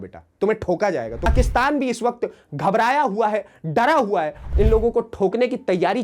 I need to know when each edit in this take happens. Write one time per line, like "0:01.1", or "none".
0:01.3
0:04.4